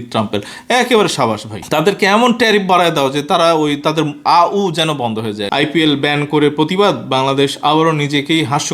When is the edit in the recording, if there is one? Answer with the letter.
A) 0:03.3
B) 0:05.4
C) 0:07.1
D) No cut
B